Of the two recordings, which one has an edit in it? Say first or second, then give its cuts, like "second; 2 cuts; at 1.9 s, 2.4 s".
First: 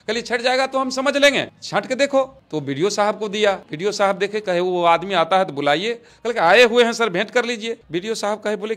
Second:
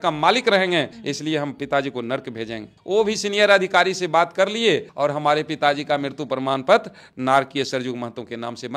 first; 2 cuts; at 3.7 s, 7.8 s